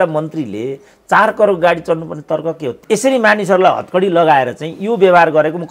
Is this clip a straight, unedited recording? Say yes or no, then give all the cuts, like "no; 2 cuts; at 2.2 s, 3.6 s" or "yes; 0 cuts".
no; 1 cut; at 2.7 s